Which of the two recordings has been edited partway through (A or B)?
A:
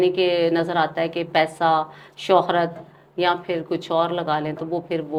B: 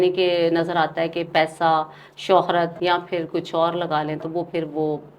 B